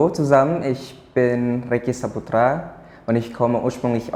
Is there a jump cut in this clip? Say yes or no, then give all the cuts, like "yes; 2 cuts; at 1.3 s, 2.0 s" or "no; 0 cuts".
no; 0 cuts